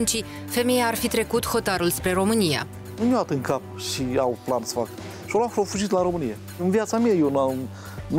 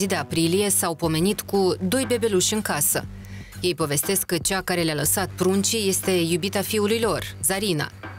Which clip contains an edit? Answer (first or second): first